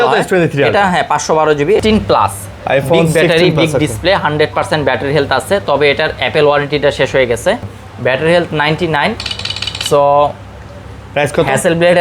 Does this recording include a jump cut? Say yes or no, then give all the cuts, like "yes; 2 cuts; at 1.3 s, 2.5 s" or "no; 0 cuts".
yes; 2 cuts; at 1.8 s, 7.6 s